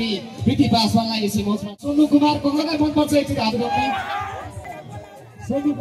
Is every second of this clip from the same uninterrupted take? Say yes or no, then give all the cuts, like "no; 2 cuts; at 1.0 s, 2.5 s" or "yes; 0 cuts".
no; 2 cuts; at 1.8 s, 4.7 s